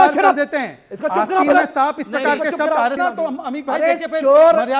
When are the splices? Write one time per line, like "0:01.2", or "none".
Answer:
0:03.0